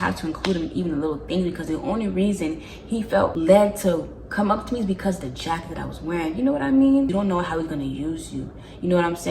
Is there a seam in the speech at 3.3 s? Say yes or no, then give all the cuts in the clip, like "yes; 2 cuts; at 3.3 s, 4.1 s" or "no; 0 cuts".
yes; 2 cuts; at 3.3 s, 7.1 s